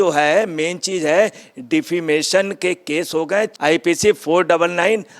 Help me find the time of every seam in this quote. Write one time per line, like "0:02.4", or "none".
none